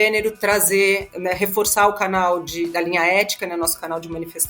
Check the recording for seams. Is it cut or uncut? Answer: cut